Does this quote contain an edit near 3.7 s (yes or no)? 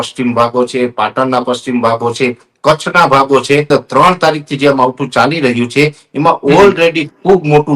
yes